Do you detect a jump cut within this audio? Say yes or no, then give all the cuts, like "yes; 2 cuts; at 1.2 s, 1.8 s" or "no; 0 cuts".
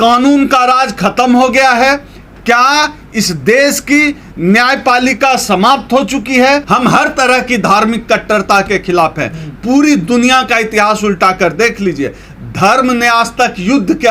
yes; 1 cut; at 6.6 s